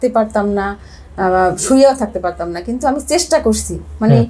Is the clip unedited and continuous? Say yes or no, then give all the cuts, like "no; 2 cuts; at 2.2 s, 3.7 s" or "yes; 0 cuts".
yes; 0 cuts